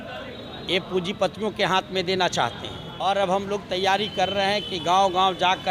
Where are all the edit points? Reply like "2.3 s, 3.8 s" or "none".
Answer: 2.9 s